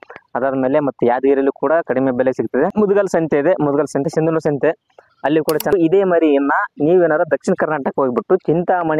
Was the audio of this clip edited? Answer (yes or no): yes